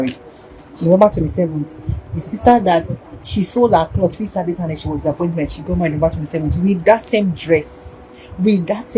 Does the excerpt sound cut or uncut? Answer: uncut